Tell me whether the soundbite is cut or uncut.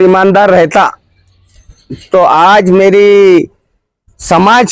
uncut